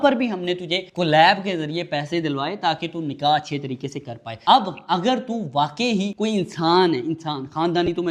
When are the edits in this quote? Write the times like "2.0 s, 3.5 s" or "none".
none